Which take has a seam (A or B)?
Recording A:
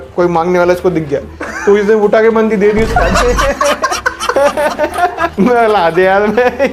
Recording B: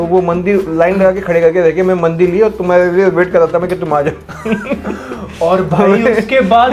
A